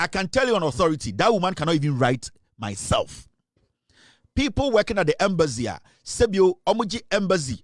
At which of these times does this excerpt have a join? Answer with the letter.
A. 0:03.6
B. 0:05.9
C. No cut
A